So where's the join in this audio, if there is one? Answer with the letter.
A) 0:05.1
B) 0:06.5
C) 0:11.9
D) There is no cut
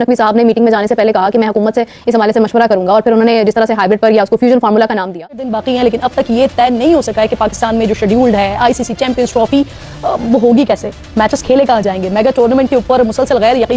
A